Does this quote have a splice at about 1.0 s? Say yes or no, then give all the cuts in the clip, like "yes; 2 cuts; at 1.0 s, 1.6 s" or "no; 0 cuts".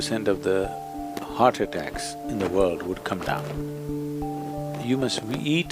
no; 1 cut; at 4.8 s